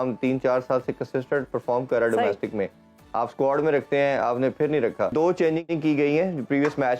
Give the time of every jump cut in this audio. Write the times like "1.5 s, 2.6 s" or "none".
5.1 s